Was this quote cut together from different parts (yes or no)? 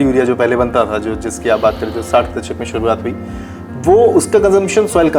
no